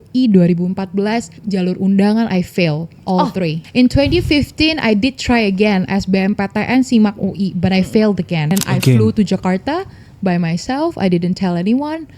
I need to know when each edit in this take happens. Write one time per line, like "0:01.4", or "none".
0:01.3
0:03.6
0:08.5